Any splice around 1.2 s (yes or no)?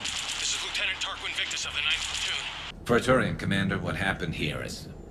no